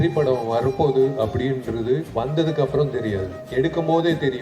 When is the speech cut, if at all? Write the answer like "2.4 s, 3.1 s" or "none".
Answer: 2.1 s, 3.4 s

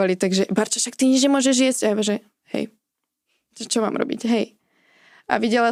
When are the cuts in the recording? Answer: none

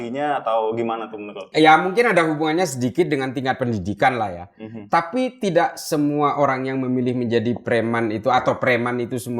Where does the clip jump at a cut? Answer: 1.5 s

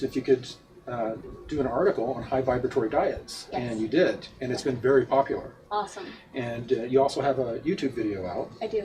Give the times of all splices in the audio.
none

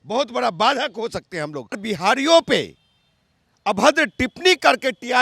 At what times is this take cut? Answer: 1.9 s

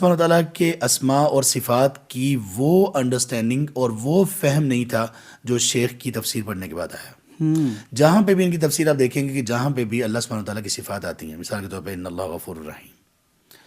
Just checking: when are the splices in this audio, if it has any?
none

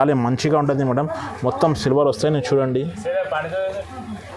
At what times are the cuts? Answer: none

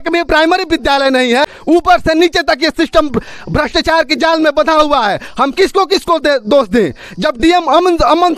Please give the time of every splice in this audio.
1.5 s

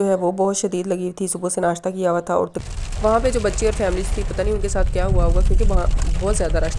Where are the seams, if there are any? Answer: 2.6 s

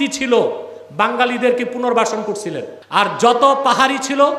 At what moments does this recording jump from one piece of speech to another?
2.7 s

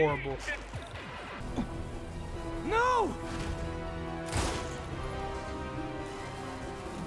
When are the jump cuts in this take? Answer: 1.4 s

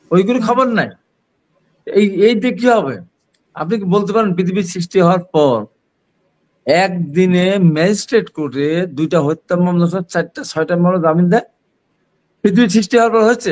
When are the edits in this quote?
none

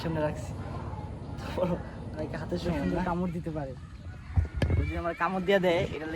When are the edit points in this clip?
3.0 s

